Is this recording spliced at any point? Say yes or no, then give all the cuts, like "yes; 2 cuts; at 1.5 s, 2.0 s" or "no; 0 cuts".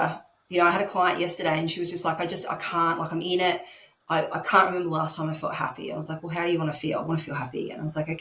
no; 0 cuts